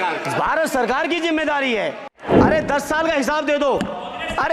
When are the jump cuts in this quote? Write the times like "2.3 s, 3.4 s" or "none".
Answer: 2.1 s